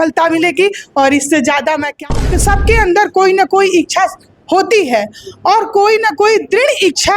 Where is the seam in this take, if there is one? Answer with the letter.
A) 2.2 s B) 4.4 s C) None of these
A